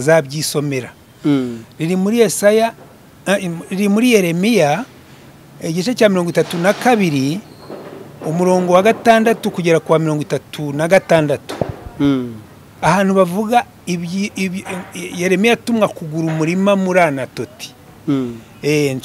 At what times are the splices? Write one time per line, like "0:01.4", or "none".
none